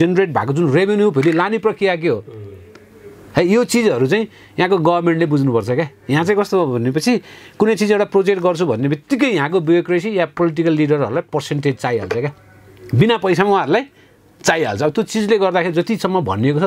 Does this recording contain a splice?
no; 0 cuts

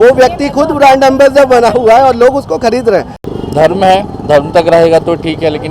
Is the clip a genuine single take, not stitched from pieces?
no; 1 cut; at 3.3 s

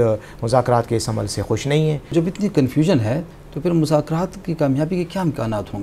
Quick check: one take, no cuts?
yes; 0 cuts

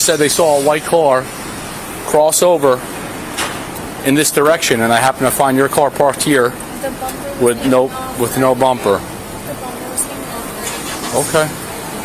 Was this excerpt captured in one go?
yes; 0 cuts

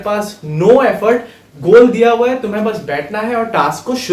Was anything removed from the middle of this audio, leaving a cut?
no; 0 cuts

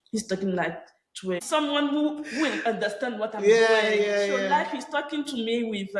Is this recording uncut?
no; 1 cut; at 1.4 s

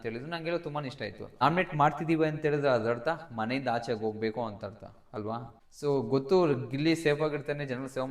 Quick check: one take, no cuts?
no; 2 cuts; at 1.2 s, 5.5 s

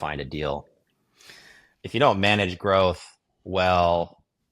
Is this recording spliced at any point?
yes; 1 cut; at 1.8 s

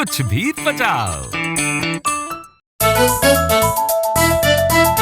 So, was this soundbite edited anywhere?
yes; 1 cut; at 2.7 s

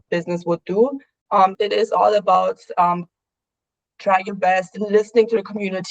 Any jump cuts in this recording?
yes; 1 cut; at 1.3 s

